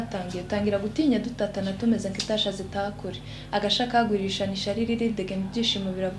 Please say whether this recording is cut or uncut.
uncut